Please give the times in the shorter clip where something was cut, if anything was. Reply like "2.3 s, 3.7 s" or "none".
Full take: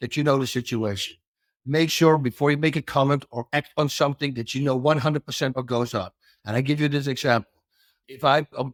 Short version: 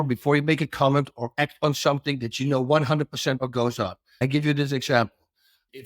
4.0 s